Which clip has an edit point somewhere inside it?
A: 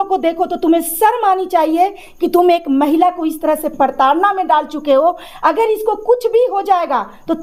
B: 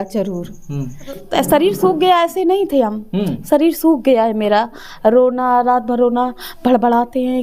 B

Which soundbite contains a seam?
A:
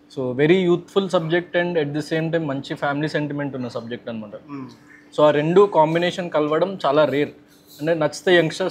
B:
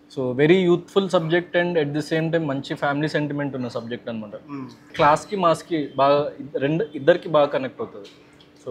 B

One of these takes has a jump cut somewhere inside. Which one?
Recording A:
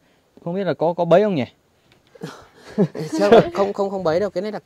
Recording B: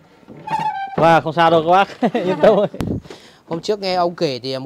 B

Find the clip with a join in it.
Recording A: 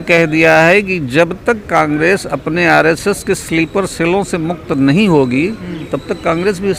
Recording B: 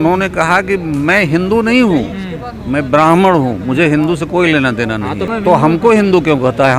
B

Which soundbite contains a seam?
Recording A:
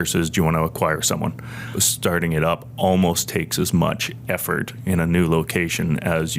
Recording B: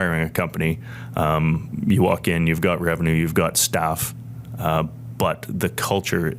A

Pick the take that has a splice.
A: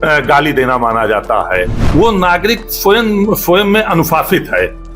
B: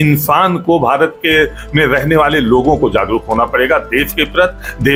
A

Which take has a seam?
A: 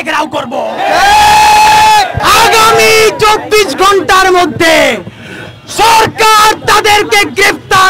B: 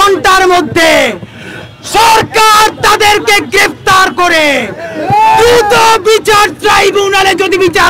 A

